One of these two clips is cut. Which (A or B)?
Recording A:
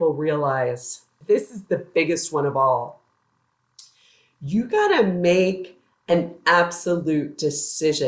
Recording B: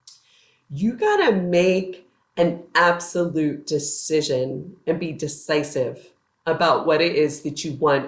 A